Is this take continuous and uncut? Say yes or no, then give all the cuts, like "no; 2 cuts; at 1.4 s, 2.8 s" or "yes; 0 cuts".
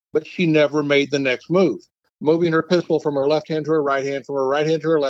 no; 1 cut; at 2.0 s